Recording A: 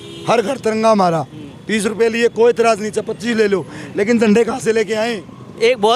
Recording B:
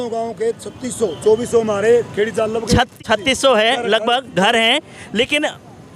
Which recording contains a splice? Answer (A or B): B